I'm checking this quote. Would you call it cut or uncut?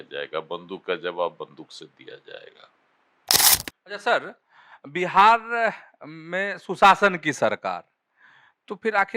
cut